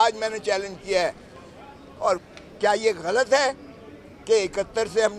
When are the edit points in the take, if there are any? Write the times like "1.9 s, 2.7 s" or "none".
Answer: 2.2 s